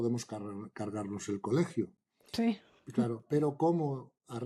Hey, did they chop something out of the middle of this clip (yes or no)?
no